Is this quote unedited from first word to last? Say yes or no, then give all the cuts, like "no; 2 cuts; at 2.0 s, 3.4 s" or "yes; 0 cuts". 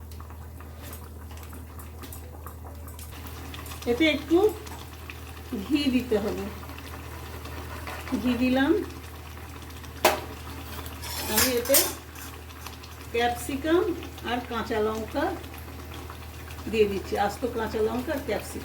no; 2 cuts; at 3.1 s, 10.3 s